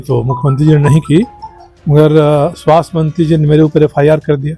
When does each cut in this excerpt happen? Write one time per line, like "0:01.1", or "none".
none

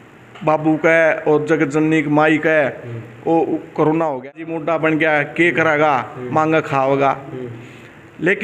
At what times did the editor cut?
0:04.5

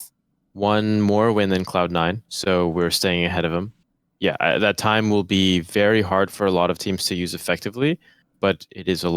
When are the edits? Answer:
0:03.8

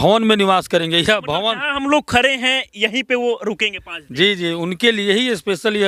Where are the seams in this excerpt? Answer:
none

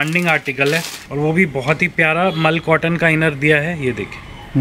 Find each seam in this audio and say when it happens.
0:01.0

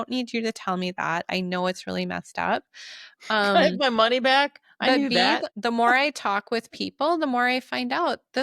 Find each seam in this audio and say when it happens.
0:05.5

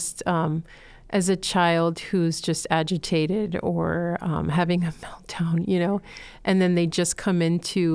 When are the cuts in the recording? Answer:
none

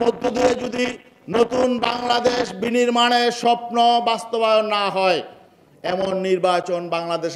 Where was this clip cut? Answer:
none

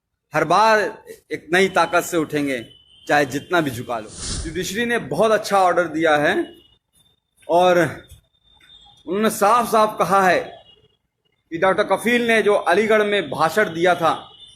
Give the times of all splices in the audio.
0:04.1

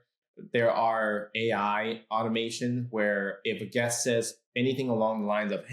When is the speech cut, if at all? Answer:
0:04.4

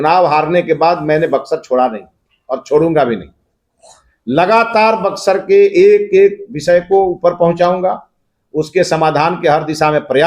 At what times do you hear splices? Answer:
none

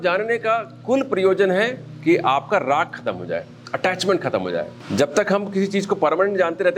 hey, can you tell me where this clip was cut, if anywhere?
0:04.8

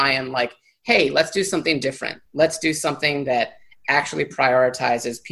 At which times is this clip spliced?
none

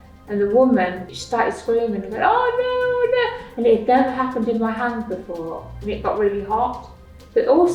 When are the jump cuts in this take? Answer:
0:01.1

